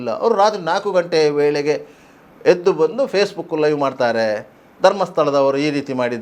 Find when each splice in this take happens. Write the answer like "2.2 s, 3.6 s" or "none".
none